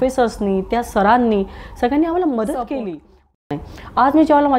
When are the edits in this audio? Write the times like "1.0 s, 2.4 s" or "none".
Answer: 3.5 s